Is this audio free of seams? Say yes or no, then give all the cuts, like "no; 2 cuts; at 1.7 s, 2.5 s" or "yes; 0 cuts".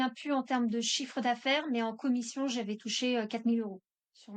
yes; 0 cuts